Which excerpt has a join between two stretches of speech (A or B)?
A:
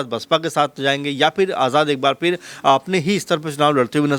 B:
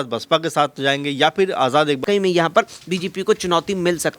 B